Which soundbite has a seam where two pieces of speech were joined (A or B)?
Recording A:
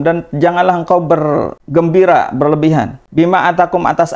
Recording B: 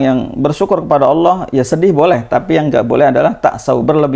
A